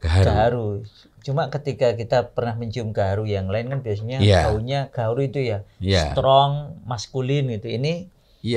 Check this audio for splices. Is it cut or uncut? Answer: uncut